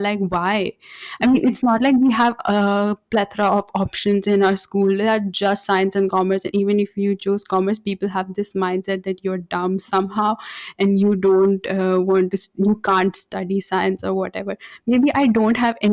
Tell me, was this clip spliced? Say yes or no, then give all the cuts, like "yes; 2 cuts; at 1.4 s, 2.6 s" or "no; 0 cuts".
no; 0 cuts